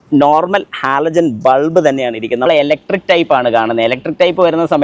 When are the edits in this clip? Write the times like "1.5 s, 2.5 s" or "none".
2.5 s

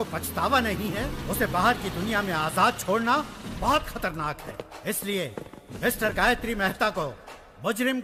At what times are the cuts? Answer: none

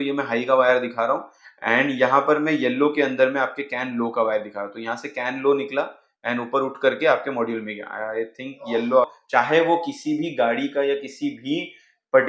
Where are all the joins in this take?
9.2 s

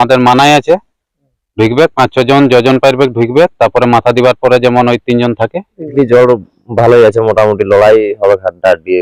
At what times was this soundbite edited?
5.9 s

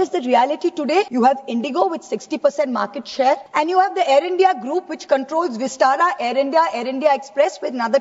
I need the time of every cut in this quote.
1.1 s, 3.5 s

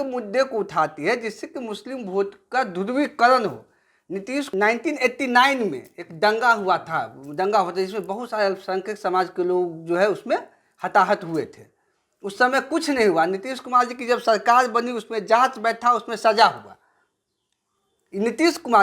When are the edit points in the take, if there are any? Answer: 4.5 s

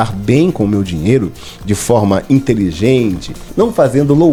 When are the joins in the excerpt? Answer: none

